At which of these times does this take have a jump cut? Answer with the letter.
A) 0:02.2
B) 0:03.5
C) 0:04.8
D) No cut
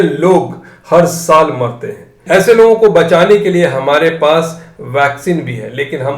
A